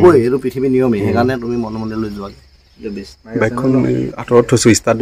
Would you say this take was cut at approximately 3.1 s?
yes; 1 cut; at 3.1 s

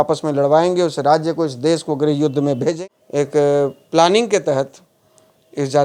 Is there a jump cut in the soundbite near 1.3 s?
no; 1 cut; at 2.8 s

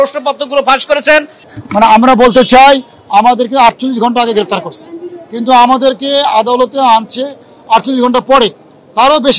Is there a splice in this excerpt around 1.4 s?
yes; 1 cut; at 1.4 s

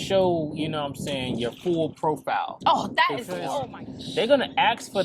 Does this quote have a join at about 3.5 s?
yes; 1 cut; at 3.5 s

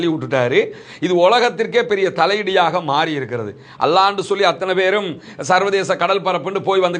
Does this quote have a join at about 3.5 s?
no; 0 cuts

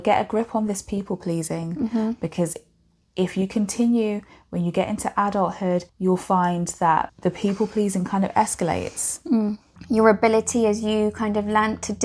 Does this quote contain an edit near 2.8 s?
no; 3 cuts; at 5.9 s, 7.1 s, 9.7 s

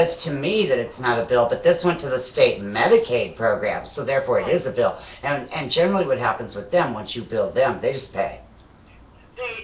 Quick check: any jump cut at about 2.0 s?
no; 1 cut; at 5.6 s

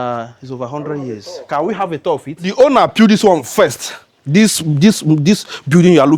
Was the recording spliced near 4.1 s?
no; 1 cut; at 2.5 s

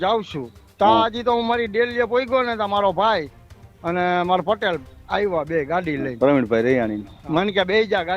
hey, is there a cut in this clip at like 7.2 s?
yes; 1 cut; at 7.2 s

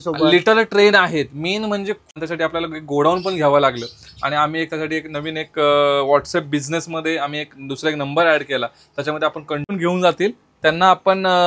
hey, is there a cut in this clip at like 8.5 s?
no; 2 cuts; at 2.1 s, 9.7 s

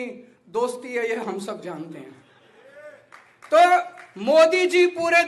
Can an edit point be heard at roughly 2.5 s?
no; 0 cuts

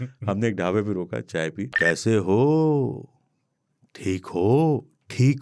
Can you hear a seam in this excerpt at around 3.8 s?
no; 1 cut; at 1.7 s

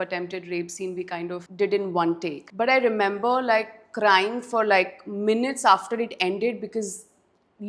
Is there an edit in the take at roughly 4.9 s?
no; 2 cuts; at 1.5 s, 2.4 s

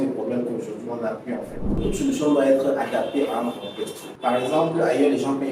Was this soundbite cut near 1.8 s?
yes; 2 cuts; at 1.8 s, 4.0 s

